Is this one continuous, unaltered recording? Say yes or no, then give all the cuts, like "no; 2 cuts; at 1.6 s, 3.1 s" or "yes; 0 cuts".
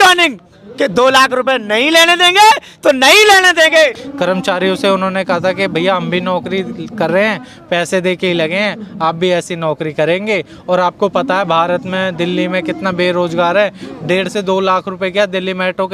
no; 1 cut; at 4.0 s